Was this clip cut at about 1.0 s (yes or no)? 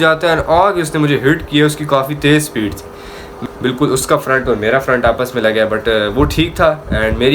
no